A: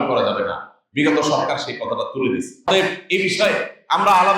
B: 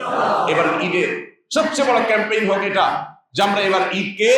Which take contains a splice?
A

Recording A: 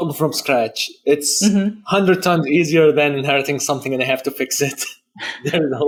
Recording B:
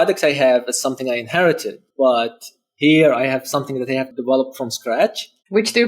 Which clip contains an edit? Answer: B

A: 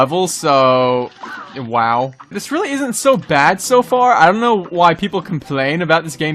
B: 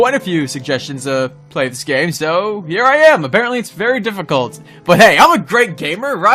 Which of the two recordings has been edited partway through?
A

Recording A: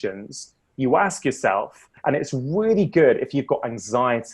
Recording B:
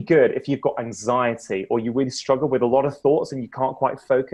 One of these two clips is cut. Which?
A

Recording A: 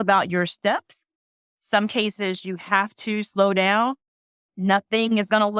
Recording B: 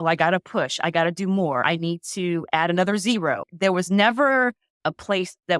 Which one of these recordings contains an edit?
B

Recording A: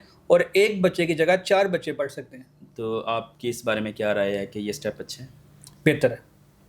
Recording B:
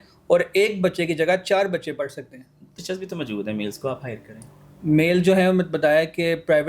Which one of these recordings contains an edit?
B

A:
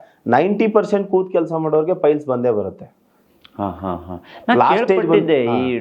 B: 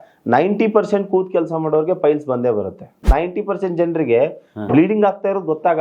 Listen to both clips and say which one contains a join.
B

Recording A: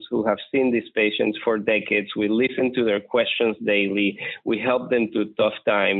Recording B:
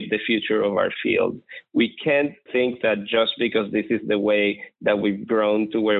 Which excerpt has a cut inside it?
B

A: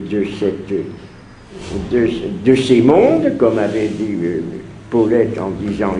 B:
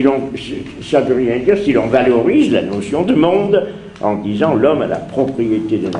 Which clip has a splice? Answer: A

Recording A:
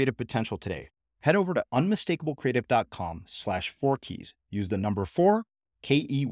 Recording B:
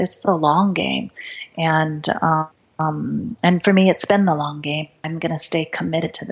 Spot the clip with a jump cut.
B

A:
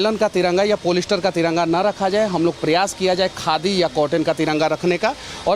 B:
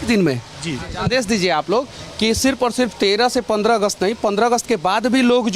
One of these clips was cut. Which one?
B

